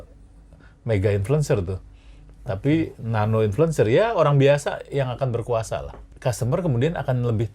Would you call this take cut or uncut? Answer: cut